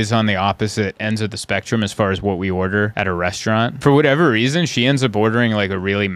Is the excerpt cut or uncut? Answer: cut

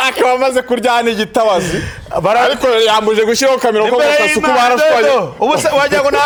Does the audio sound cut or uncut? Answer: uncut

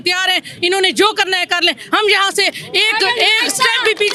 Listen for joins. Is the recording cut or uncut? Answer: uncut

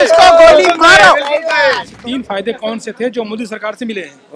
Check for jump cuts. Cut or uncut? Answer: cut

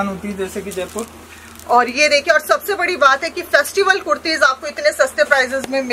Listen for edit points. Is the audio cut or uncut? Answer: uncut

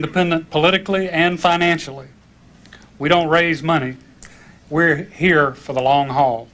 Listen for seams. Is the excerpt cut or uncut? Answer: uncut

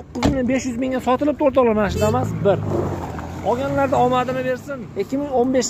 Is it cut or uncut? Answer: cut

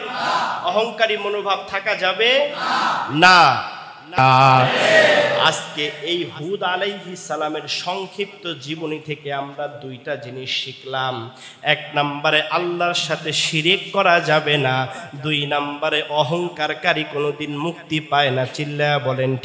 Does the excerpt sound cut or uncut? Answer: cut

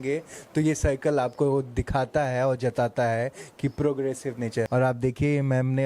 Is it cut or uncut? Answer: cut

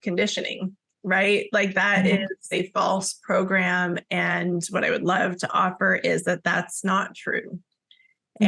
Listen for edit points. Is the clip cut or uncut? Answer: cut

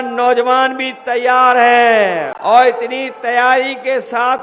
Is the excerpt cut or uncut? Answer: cut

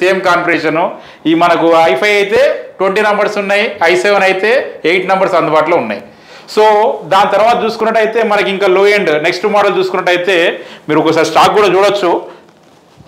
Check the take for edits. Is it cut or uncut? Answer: uncut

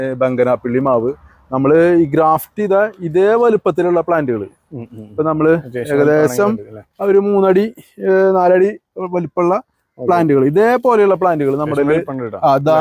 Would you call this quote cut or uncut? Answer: uncut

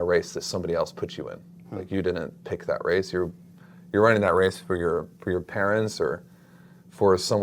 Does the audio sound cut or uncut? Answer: uncut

